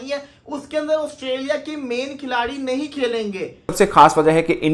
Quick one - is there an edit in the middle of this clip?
yes; 1 cut; at 3.7 s

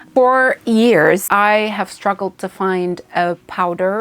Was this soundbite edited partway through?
yes; 1 cut; at 1.2 s

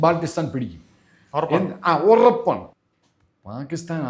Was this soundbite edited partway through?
yes; 1 cut; at 2.7 s

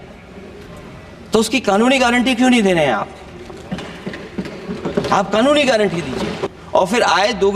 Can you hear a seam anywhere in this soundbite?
yes; 1 cut; at 6.5 s

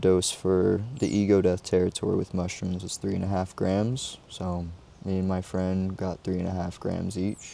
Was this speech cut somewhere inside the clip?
no; 0 cuts

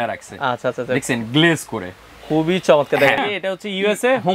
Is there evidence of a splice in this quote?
yes; 1 cut; at 3.2 s

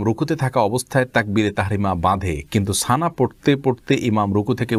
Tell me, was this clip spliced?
no; 0 cuts

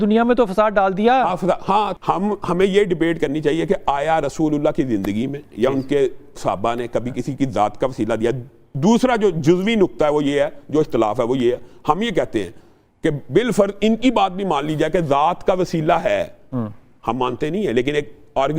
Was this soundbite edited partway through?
yes; 1 cut; at 1.9 s

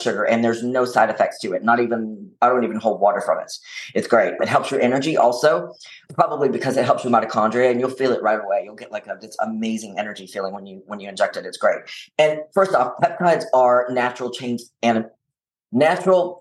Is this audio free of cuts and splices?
yes; 0 cuts

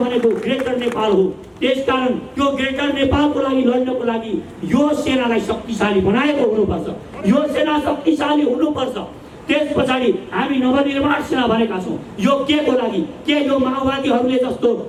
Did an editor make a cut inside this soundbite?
no; 0 cuts

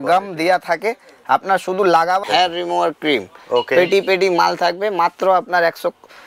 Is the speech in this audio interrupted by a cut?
yes; 1 cut; at 2.2 s

